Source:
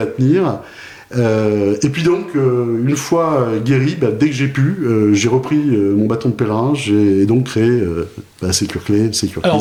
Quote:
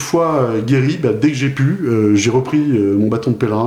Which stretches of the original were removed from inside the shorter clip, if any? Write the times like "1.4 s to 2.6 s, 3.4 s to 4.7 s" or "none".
none